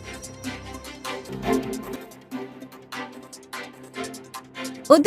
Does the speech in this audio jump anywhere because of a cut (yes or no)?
yes